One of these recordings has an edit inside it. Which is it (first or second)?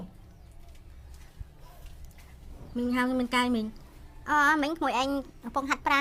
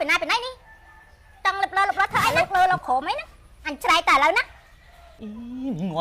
second